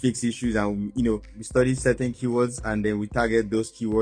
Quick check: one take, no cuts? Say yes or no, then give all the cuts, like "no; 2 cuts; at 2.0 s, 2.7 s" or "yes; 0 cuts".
no; 1 cut; at 1.4 s